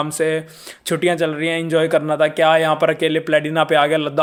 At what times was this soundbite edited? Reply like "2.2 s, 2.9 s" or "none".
none